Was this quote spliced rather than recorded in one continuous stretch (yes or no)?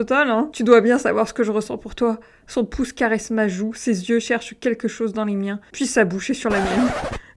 no